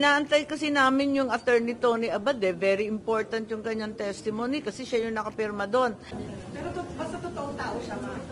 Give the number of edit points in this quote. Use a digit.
1